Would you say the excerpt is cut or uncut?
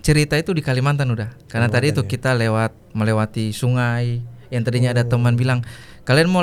uncut